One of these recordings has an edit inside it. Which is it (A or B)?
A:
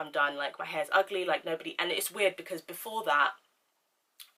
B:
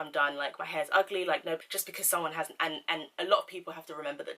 B